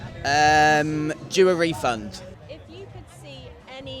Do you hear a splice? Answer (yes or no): yes